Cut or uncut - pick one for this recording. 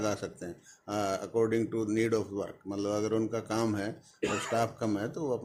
uncut